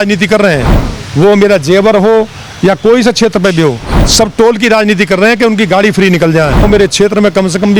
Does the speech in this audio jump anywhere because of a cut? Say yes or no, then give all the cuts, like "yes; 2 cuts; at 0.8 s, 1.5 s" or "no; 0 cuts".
yes; 1 cut; at 6.6 s